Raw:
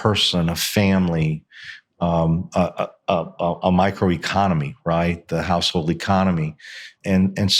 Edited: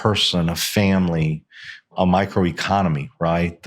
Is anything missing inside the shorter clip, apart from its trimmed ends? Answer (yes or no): yes